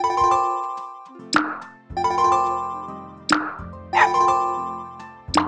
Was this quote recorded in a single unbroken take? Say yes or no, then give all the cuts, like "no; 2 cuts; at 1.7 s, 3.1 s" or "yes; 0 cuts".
no; 1 cut; at 0.9 s